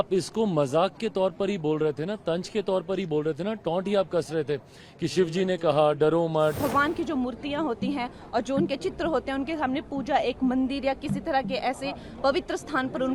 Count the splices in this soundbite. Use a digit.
1